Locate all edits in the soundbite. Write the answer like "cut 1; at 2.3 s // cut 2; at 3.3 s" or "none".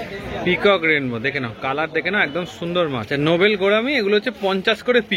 cut 1; at 3.1 s

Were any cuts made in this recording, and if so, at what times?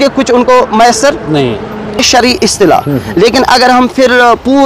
cut 1; at 2.0 s

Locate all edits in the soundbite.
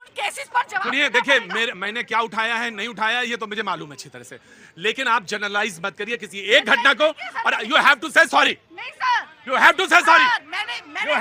none

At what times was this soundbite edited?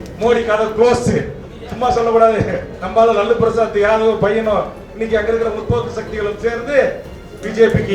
none

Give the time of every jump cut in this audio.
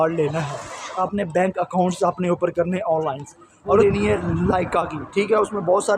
cut 1; at 1.0 s // cut 2; at 3.8 s

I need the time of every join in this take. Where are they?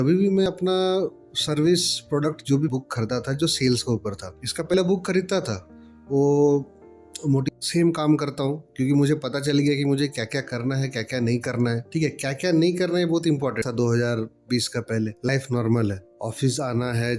cut 1; at 2.7 s // cut 2; at 7.4 s // cut 3; at 13.6 s

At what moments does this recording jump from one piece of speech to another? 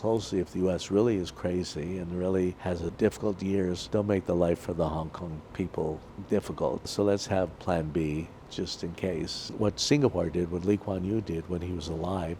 cut 1; at 2.9 s // cut 2; at 3.8 s // cut 3; at 6.1 s // cut 4; at 6.9 s // cut 5; at 9.5 s

